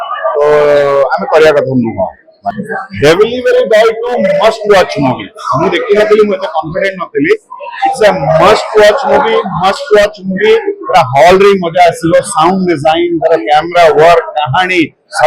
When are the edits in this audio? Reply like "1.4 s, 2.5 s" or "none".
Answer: 2.5 s